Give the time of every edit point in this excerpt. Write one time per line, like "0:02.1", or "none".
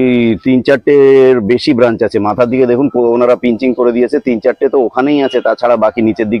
none